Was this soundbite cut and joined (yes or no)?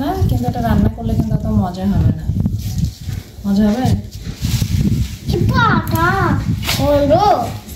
no